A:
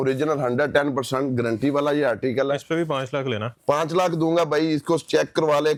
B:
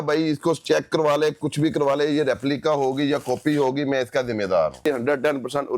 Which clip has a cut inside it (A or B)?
B